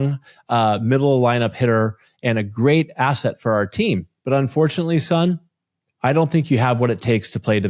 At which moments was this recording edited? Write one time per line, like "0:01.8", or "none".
0:04.1